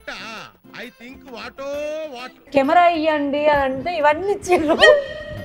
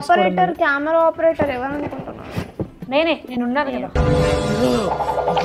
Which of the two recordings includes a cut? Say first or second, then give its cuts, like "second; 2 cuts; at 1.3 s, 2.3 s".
first; 1 cut; at 2.4 s